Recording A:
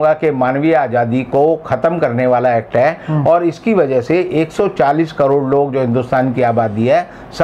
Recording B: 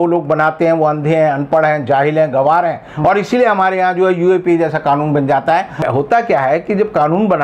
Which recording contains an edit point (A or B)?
B